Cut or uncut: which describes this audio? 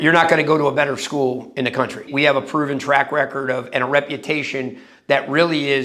uncut